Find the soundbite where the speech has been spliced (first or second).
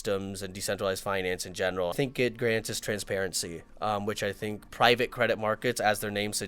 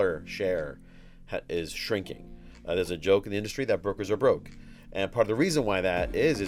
first